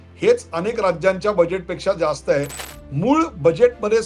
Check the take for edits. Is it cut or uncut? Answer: cut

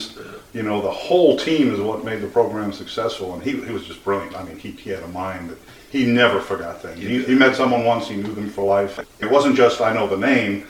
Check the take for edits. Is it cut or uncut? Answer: uncut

